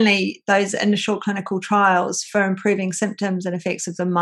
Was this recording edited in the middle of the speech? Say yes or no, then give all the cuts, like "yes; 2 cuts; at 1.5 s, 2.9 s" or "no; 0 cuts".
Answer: no; 0 cuts